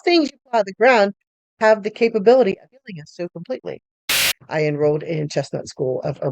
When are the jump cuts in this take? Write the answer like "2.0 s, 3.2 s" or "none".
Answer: 4.2 s

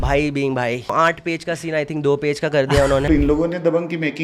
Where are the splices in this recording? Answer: 0.9 s, 3.0 s

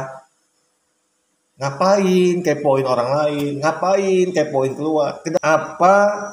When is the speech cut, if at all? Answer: 5.4 s

